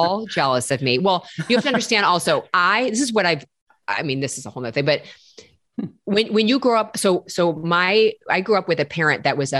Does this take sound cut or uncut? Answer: uncut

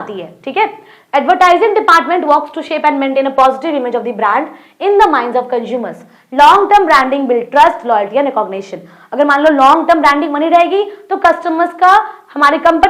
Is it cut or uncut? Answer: uncut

